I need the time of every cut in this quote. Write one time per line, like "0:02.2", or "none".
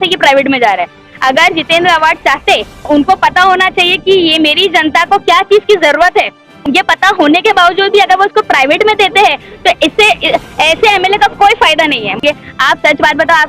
0:02.8
0:06.6
0:12.2